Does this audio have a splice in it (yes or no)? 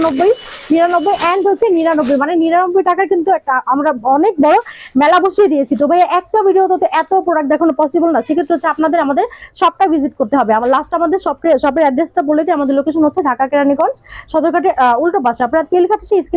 no